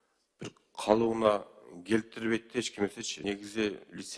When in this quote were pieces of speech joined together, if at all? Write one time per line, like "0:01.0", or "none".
0:03.1